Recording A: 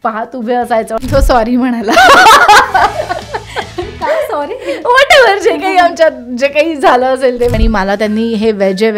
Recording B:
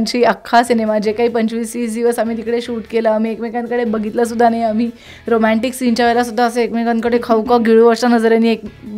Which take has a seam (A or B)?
A